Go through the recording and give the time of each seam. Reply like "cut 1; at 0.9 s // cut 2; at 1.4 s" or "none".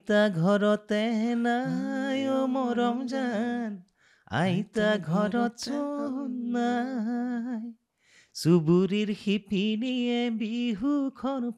none